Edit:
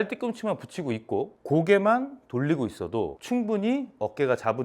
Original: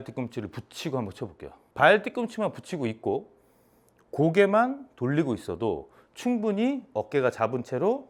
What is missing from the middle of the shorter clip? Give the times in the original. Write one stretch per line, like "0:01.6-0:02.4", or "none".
0:03.3-0:04.0
0:05.9-0:06.1